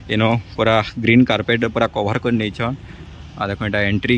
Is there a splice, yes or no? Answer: yes